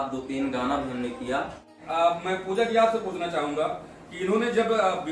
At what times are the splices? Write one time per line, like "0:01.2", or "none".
0:01.8